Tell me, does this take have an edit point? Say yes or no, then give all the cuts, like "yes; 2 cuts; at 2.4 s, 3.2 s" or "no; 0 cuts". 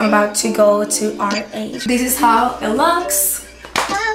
yes; 1 cut; at 1.8 s